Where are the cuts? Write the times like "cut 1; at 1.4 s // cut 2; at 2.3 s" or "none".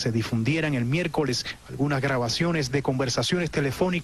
cut 1; at 1.6 s